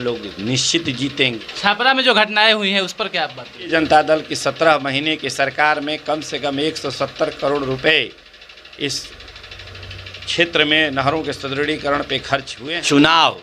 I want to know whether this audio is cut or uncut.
cut